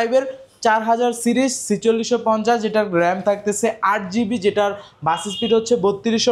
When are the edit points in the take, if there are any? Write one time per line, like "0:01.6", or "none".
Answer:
none

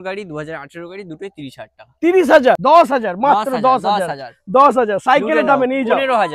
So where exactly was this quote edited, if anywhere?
0:02.6

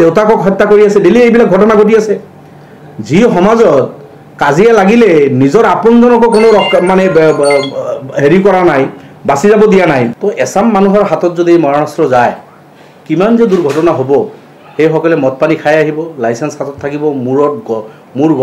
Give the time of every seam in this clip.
0:10.1

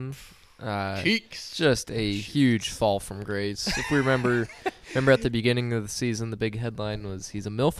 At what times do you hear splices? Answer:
none

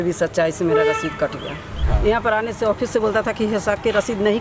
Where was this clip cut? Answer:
0:01.9

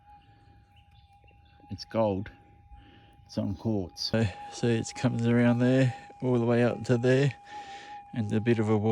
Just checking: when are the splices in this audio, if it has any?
0:04.1

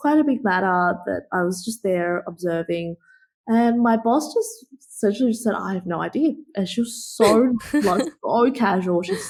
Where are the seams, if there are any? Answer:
none

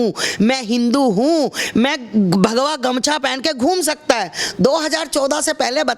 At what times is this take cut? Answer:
none

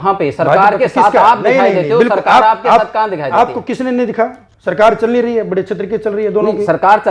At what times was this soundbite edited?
none

